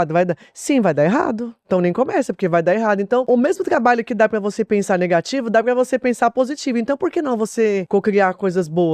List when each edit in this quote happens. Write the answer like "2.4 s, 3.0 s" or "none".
3.2 s, 7.8 s